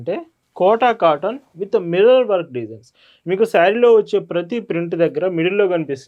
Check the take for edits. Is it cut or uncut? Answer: uncut